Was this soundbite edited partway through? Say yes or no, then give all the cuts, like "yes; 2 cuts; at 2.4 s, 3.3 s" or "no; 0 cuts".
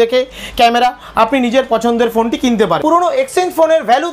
yes; 1 cut; at 2.8 s